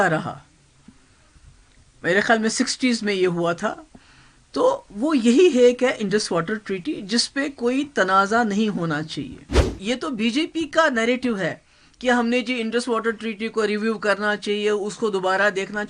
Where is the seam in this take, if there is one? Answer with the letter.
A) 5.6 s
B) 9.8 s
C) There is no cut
B